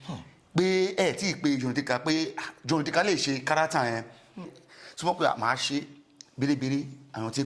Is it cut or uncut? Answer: cut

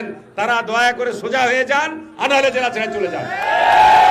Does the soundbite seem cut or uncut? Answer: uncut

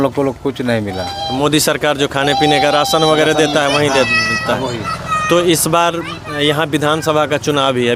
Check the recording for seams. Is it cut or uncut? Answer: uncut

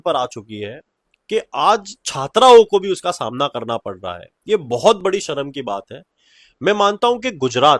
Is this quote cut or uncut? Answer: uncut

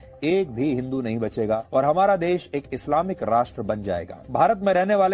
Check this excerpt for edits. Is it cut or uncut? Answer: cut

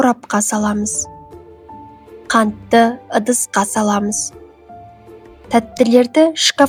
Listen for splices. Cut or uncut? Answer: uncut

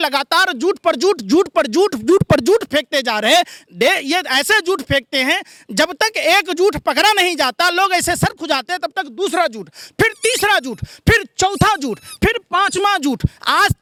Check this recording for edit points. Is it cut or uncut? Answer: uncut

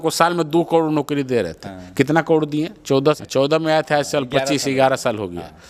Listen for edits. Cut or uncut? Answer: uncut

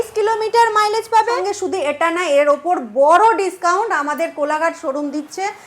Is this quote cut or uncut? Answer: cut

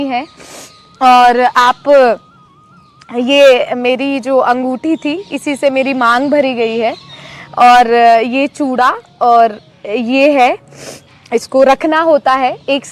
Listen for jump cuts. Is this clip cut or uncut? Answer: uncut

